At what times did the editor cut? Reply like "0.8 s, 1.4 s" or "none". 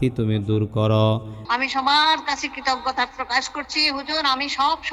1.4 s